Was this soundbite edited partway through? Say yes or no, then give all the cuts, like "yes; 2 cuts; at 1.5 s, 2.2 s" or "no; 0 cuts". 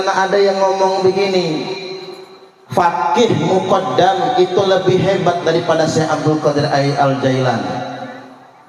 no; 0 cuts